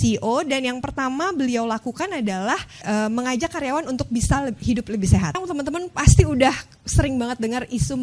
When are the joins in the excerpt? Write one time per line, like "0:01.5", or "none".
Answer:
0:02.8
0:05.4